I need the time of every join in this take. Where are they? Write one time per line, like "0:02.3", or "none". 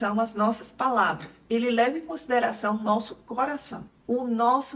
0:03.8